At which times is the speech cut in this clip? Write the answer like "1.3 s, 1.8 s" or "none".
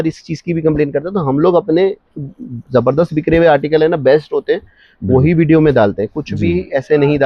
none

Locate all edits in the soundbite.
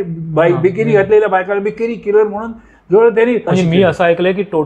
3.5 s

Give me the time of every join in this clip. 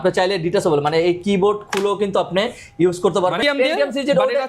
3.4 s

